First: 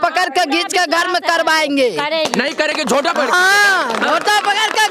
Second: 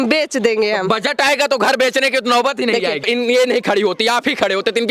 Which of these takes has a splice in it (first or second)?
second